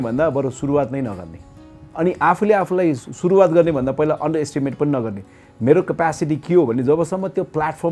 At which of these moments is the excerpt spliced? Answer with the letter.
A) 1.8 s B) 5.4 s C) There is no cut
A